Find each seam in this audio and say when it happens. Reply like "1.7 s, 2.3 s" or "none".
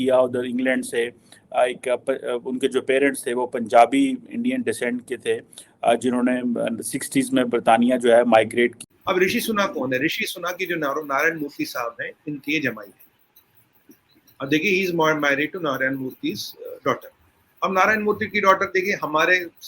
8.8 s